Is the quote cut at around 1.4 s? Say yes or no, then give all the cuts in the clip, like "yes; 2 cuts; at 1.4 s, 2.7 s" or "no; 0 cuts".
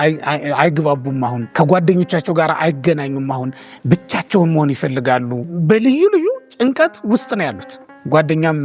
yes; 2 cuts; at 1.4 s, 5.5 s